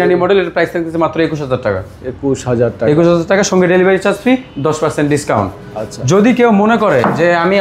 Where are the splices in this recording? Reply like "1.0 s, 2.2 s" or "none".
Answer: none